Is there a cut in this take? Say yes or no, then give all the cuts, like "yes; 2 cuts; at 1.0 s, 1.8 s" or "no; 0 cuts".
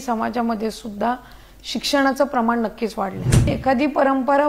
yes; 1 cut; at 3.5 s